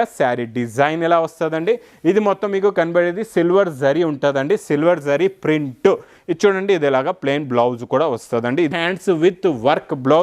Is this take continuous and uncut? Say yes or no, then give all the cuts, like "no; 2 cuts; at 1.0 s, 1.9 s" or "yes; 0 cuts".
no; 1 cut; at 8.7 s